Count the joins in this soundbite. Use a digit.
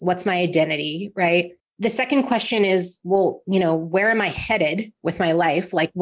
1